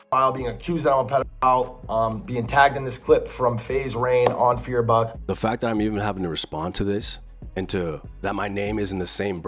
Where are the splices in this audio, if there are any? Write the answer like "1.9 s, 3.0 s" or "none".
5.2 s